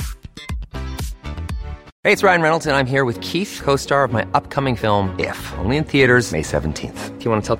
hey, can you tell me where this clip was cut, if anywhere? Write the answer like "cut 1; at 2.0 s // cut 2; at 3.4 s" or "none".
cut 1; at 1.8 s